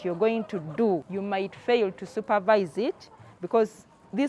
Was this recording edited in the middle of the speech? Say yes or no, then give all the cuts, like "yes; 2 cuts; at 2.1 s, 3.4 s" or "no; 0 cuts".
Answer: yes; 1 cut; at 1.1 s